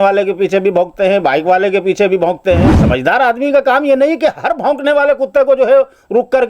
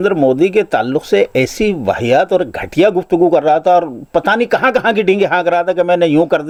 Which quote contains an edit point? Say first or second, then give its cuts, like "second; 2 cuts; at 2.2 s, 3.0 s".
first; 1 cut; at 2.8 s